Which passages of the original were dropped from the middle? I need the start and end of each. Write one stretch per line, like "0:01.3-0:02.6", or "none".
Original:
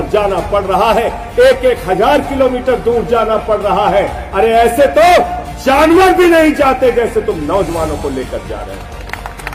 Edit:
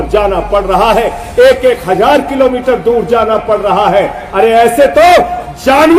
none

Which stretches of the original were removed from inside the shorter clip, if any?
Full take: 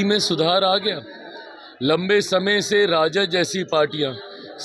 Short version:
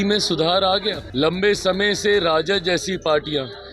0:01.0-0:01.7

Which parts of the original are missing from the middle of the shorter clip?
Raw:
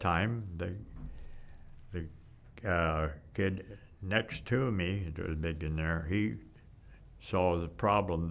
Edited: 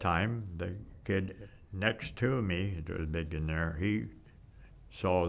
0:00.9-0:03.2

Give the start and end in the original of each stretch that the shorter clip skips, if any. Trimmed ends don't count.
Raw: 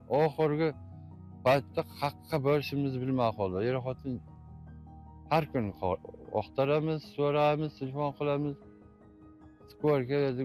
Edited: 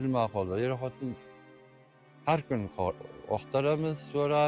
none

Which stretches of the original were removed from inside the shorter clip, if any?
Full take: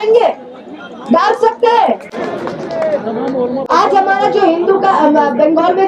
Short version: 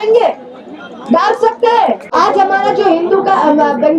0:02.1-0:03.6

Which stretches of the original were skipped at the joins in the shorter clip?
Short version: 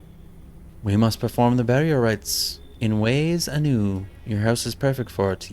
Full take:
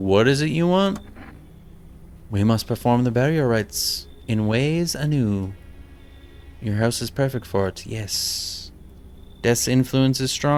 0:05.6-0:06.5

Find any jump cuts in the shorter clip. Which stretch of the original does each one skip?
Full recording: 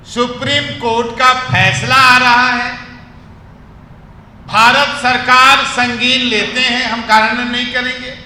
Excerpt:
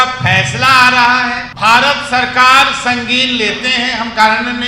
0:02.8-0:04.4

